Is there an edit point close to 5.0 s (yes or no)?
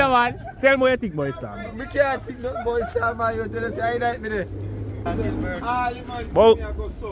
yes